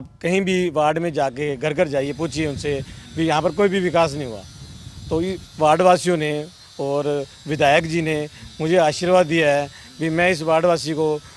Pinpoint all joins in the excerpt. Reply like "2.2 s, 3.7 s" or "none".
none